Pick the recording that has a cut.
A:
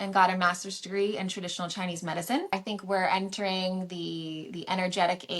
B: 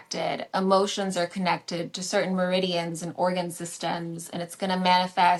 A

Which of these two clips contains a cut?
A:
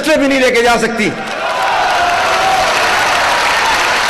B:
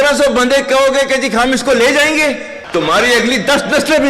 B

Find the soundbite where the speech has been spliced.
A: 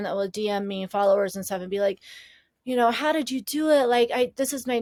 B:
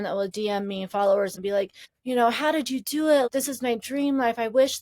B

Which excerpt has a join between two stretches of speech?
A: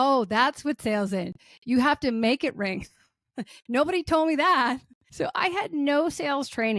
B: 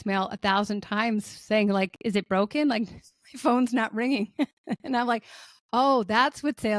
A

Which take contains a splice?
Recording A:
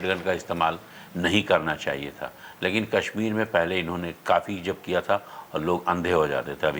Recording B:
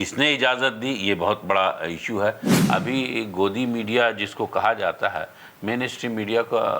B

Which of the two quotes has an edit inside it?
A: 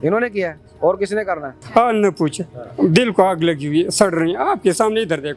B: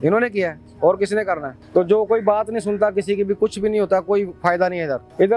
A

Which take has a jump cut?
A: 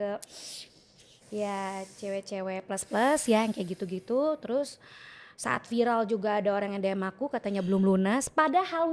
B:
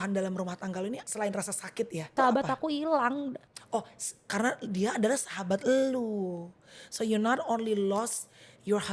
B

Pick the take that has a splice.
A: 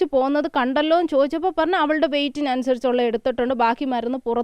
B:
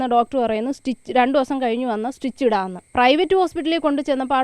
B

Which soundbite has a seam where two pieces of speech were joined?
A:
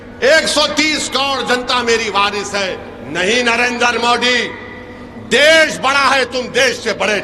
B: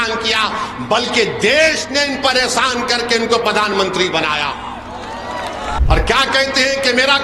B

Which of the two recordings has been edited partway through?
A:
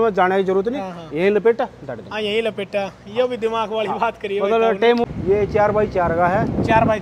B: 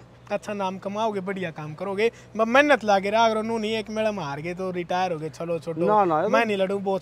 A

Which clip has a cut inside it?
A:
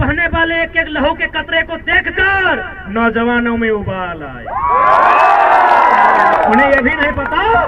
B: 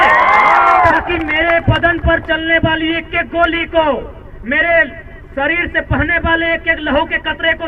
A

